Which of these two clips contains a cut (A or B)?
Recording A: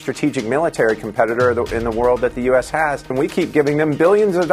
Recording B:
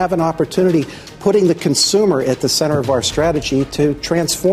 A